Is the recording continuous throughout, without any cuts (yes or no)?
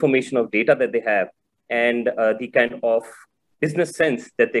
no